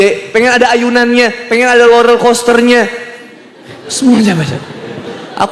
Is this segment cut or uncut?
uncut